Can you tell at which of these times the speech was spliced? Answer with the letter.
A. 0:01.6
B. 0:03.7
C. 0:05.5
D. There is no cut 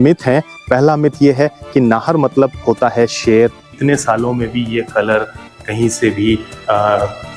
B